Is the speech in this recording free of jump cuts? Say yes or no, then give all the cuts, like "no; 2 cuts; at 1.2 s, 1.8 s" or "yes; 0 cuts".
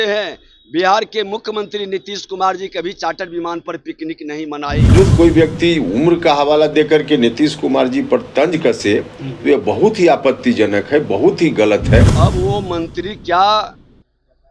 no; 2 cuts; at 4.9 s, 12.1 s